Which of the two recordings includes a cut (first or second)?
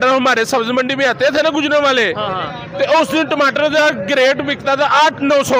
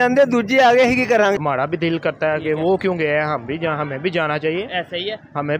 second